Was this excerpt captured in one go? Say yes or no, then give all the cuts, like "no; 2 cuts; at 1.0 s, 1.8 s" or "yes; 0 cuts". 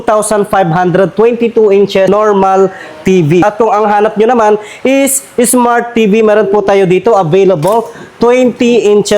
no; 2 cuts; at 2.1 s, 3.4 s